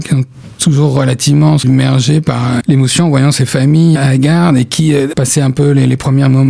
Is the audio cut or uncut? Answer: cut